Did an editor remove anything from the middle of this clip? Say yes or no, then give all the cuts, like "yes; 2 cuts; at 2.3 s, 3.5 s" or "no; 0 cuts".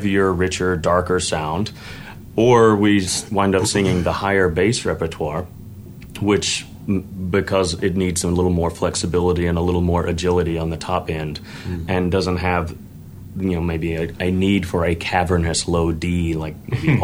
no; 0 cuts